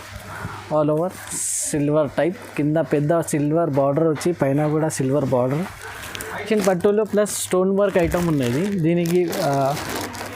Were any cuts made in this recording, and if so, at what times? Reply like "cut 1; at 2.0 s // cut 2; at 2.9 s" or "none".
cut 1; at 6.5 s